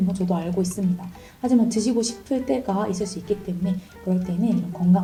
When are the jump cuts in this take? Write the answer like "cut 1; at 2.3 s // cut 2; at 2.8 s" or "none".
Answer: none